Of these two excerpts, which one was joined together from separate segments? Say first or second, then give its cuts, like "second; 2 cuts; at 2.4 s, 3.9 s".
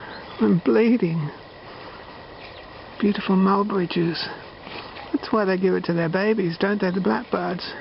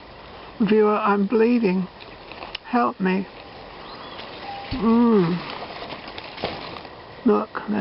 second; 1 cut; at 6.8 s